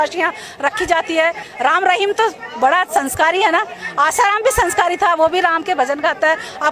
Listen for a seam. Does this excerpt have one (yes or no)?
yes